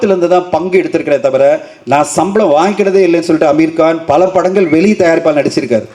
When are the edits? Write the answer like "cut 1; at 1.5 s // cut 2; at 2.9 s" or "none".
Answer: none